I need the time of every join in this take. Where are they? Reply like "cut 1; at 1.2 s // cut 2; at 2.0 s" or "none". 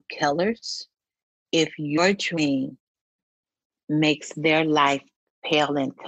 cut 1; at 1.3 s